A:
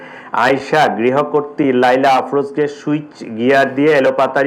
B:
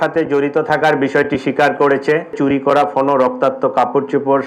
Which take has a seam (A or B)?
B